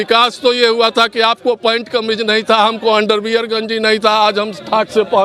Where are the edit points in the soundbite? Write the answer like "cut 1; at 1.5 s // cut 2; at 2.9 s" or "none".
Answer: none